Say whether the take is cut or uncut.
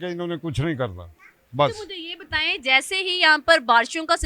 uncut